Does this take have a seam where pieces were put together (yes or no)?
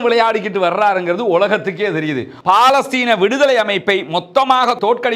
yes